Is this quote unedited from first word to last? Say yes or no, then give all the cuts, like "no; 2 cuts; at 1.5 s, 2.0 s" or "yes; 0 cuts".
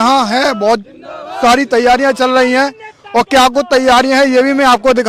yes; 0 cuts